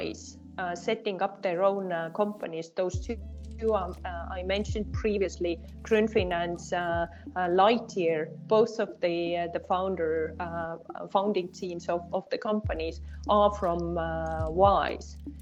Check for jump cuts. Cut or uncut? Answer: uncut